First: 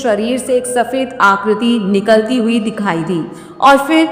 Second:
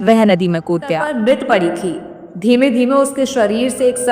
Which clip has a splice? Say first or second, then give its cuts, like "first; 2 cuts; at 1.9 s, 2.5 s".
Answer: second; 1 cut; at 1.1 s